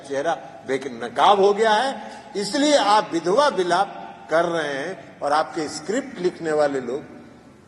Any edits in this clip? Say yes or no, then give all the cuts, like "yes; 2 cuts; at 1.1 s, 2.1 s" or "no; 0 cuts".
no; 0 cuts